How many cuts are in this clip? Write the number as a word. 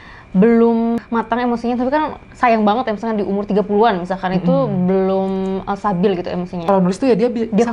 two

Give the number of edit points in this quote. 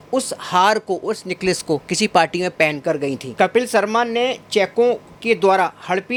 zero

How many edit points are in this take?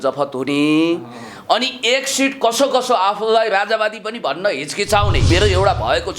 one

